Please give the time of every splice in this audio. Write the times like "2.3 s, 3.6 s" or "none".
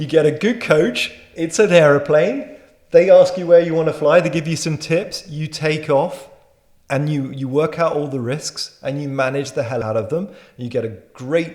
9.8 s